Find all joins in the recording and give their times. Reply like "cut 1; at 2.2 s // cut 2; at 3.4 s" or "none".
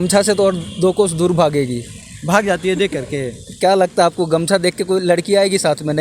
none

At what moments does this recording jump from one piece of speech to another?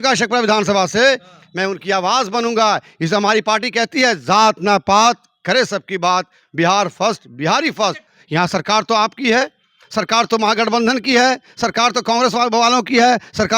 cut 1; at 8.1 s

